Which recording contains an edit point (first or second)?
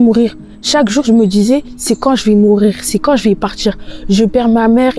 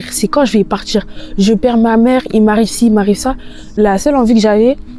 second